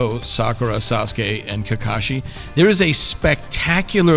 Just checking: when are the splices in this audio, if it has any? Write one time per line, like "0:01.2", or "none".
none